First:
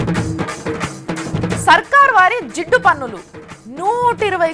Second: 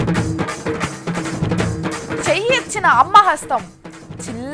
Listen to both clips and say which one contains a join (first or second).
second